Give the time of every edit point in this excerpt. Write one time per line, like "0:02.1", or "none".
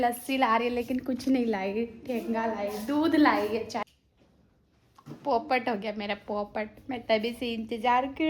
0:03.8

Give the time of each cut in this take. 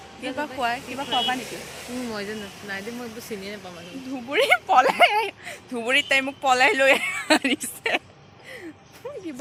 none

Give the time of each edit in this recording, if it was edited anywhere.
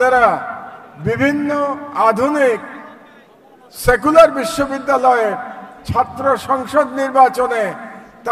none

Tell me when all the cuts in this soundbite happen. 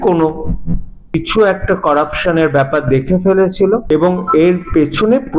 0:01.1
0:03.8

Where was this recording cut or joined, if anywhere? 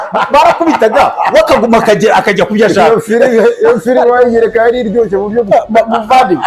none

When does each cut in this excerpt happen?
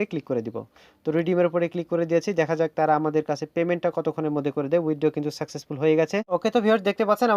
0:06.3

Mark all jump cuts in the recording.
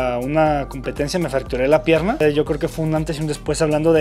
0:02.2

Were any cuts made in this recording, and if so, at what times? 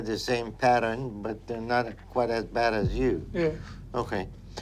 none

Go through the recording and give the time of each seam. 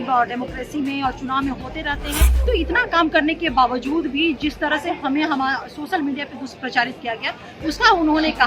0:02.2

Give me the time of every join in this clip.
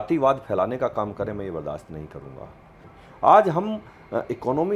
0:02.9

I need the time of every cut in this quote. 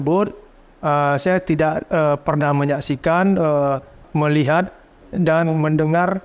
0:04.0

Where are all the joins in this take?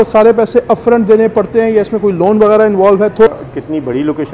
0:03.3

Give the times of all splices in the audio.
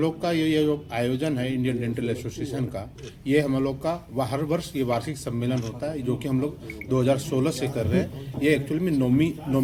none

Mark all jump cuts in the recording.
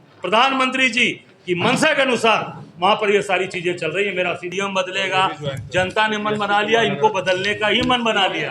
0:04.5

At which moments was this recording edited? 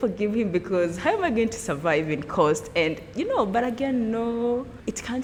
none

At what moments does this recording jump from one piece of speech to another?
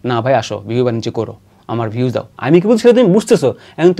0:02.3

